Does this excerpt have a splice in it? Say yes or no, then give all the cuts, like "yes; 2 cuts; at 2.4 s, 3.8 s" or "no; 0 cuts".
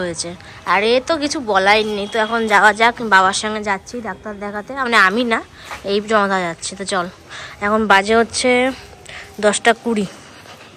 no; 0 cuts